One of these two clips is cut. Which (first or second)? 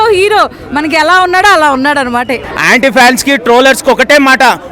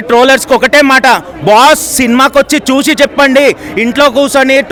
first